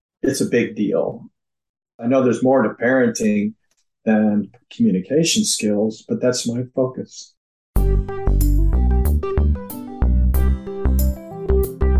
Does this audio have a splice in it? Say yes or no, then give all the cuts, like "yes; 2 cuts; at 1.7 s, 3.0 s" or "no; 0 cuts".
yes; 2 cuts; at 1.9 s, 7.5 s